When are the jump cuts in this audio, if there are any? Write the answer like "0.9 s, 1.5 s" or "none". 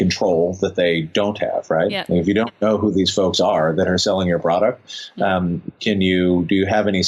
none